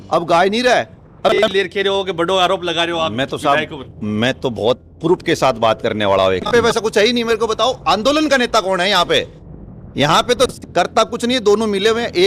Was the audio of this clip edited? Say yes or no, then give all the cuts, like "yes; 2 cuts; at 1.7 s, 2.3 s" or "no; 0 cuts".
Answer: yes; 3 cuts; at 1.3 s, 6.5 s, 10.5 s